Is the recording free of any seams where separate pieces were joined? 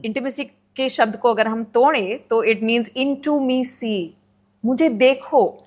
yes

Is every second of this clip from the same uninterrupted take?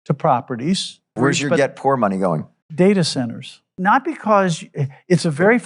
no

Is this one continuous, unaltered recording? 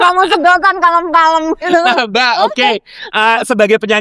yes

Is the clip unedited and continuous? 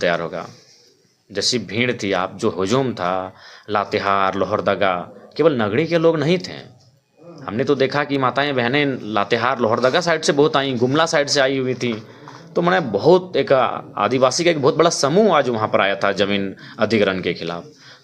yes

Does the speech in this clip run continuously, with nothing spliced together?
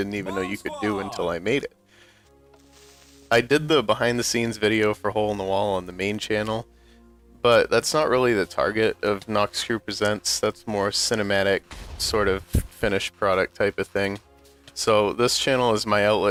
yes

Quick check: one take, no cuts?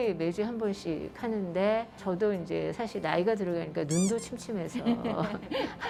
yes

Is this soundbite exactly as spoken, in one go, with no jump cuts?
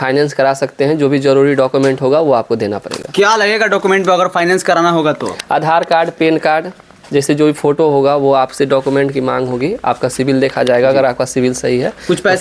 yes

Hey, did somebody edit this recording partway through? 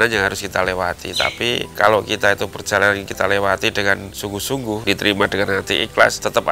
yes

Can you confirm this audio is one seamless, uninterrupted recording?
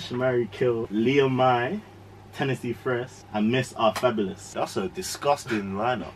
no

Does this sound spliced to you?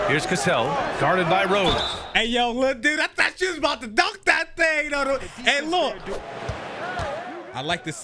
yes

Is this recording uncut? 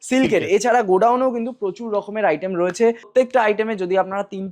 no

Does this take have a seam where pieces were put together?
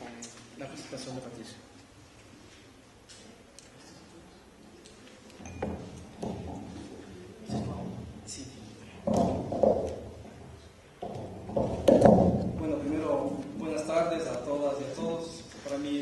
no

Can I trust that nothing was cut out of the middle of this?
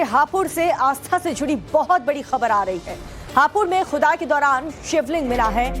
no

